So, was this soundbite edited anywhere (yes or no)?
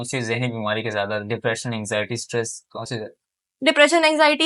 no